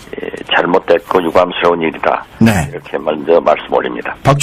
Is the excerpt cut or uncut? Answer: cut